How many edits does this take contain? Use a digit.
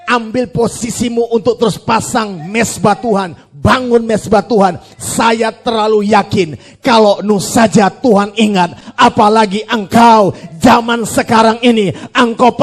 0